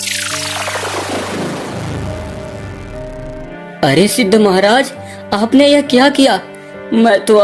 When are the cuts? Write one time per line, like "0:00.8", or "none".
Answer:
0:03.5